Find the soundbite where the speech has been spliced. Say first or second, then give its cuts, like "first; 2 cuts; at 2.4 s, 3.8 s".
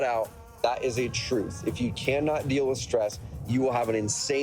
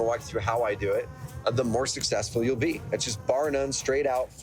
first; 1 cut; at 2.8 s